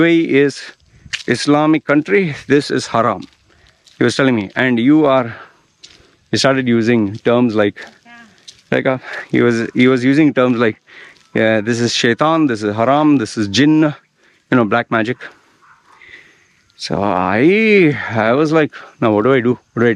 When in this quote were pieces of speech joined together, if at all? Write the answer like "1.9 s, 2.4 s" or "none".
none